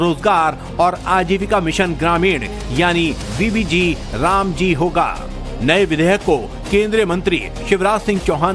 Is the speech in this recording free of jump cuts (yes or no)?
yes